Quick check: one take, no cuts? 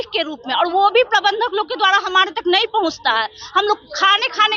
yes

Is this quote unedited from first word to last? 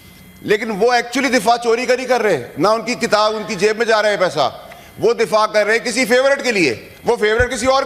yes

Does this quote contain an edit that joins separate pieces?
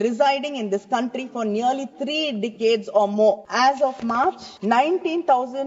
yes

